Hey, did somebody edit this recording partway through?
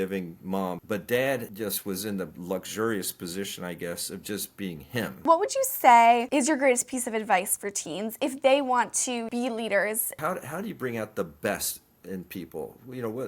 yes; 6 cuts; at 0.8 s, 1.5 s, 5.2 s, 6.3 s, 9.3 s, 10.2 s

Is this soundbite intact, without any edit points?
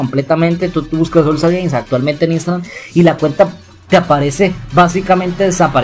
yes; 0 cuts

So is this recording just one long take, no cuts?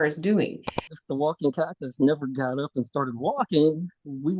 no; 1 cut; at 0.9 s

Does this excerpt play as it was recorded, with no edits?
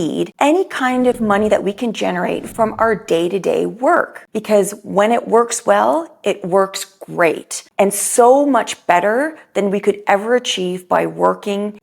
no; 1 cut; at 4.2 s

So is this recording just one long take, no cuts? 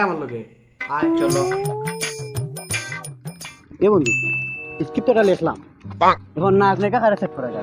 yes; 0 cuts

